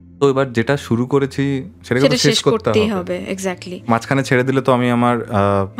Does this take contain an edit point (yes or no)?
no